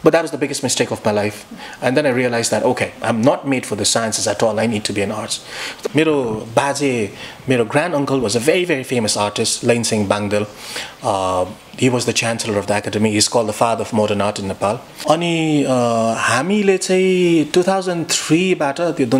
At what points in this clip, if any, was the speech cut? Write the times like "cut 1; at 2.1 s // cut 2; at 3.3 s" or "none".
cut 1; at 5.7 s // cut 2; at 14.9 s